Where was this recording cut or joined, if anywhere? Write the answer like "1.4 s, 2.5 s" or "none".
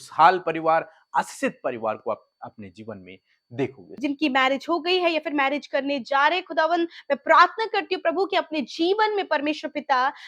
4.0 s